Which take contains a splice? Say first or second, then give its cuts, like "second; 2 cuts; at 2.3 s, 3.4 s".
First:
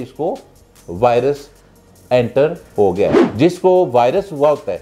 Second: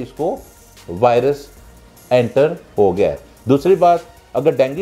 first; 1 cut; at 3.2 s